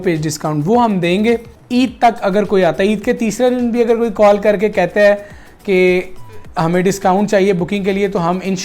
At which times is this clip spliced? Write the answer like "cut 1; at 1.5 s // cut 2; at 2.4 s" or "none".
cut 1; at 1.6 s